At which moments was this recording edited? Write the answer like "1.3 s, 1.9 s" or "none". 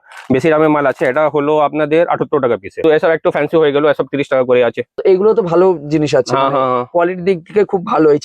2.8 s, 5.0 s